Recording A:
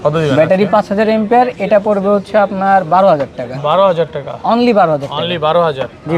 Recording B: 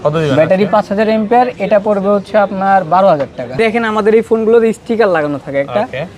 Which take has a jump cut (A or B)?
B